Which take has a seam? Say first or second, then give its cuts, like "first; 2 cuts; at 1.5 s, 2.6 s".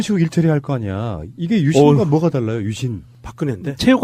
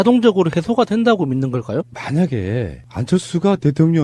second; 1 cut; at 1.9 s